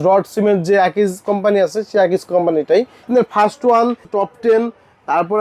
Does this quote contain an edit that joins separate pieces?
yes; 2 cuts; at 3.0 s, 4.1 s

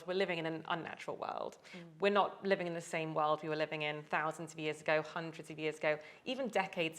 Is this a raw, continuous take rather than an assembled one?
yes; 0 cuts

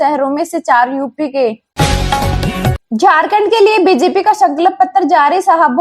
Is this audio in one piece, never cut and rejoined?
no; 2 cuts; at 1.7 s, 2.8 s

